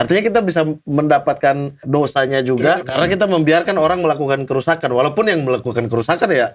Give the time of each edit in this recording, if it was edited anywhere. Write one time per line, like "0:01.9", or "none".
0:01.8
0:02.9

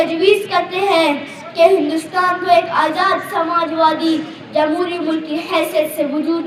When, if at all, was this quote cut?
none

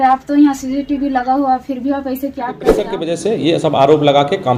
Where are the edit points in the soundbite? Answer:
0:02.9

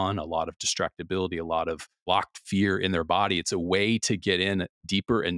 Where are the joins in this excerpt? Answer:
0:02.1

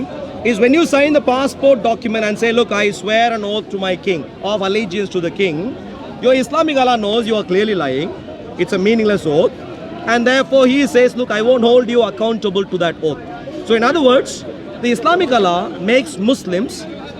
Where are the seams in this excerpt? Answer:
none

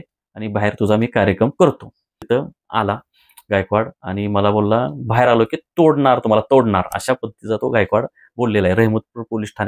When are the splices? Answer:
0:02.2

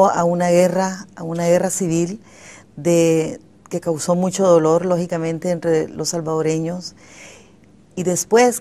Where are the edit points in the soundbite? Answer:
0:03.3

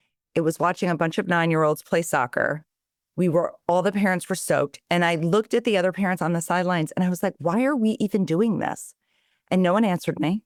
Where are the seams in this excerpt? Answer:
none

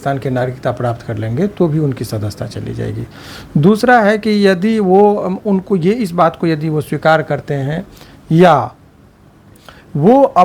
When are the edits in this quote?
none

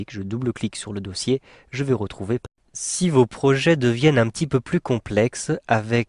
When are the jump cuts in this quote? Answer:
none

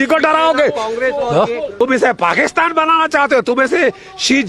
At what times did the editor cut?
0:01.8

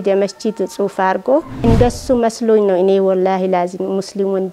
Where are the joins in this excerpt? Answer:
0:01.6

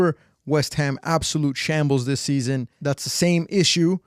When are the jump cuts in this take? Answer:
0:02.7

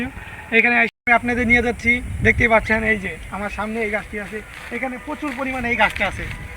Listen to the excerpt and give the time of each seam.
0:00.9

